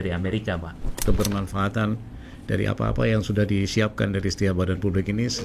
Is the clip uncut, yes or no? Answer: no